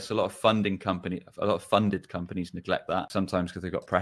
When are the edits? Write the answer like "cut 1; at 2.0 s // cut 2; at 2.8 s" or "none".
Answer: cut 1; at 3.1 s